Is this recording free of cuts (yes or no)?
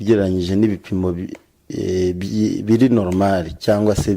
no